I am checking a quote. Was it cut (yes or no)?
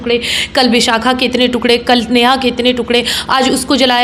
no